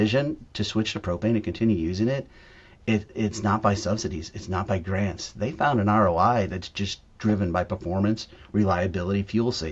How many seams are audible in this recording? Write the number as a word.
zero